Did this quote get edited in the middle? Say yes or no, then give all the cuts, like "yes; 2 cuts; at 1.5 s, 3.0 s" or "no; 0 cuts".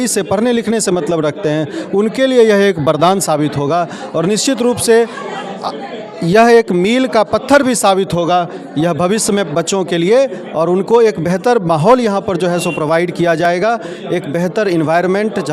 no; 0 cuts